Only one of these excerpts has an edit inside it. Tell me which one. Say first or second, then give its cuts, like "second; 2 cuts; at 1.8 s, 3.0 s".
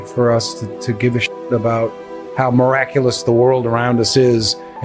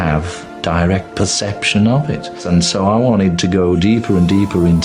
second; 1 cut; at 2.4 s